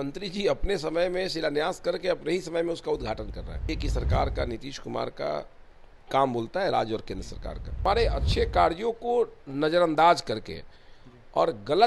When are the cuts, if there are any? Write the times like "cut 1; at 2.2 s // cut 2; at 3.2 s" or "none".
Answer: cut 1; at 3.7 s // cut 2; at 7.8 s